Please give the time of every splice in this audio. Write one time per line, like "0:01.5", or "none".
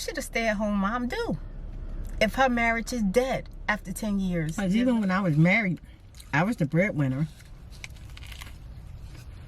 0:04.6